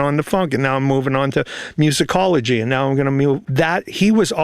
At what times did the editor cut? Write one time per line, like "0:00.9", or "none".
0:03.4